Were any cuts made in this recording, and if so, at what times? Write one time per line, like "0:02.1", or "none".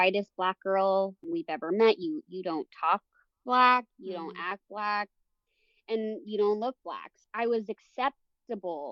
0:01.3
0:07.2